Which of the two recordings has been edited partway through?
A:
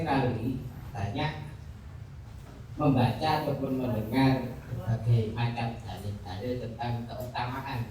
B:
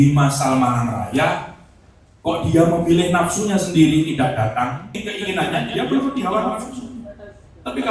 B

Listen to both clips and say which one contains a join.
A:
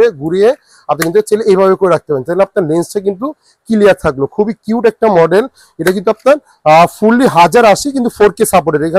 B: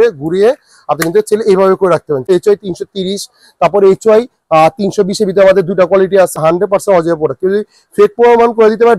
B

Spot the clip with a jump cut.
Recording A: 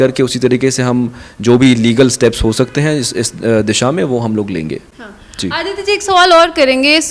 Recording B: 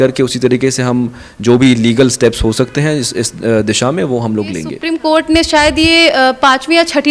B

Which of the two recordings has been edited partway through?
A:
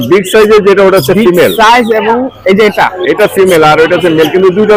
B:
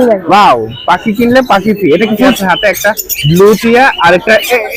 B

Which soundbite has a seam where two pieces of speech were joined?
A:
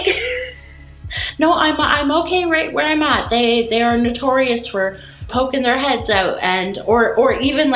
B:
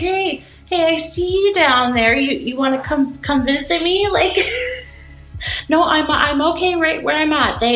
A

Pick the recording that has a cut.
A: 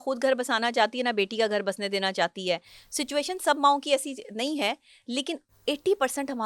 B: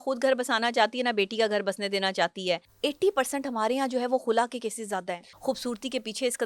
B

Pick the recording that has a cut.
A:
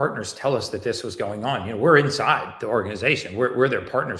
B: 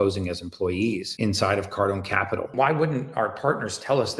B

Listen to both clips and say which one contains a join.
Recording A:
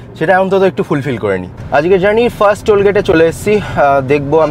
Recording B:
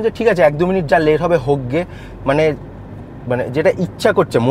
A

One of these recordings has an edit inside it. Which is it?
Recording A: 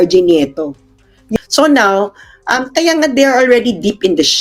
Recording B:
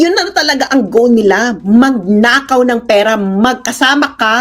A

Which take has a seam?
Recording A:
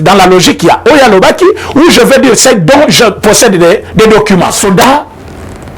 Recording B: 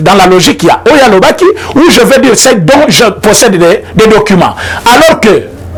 A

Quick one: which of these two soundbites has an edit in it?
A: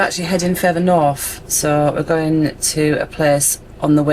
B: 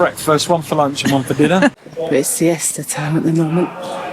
B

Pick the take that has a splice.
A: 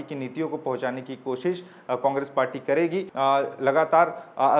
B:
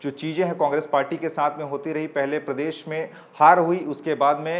A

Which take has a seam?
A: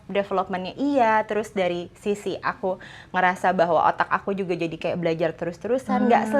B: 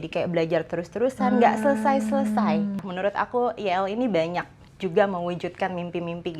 B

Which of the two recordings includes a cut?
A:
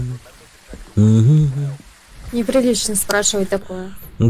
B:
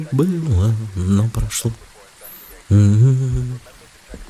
A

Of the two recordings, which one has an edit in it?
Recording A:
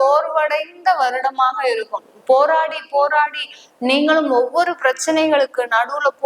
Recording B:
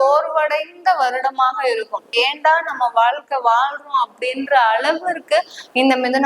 B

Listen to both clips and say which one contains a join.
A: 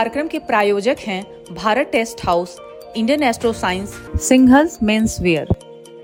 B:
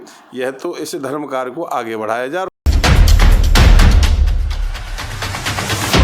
B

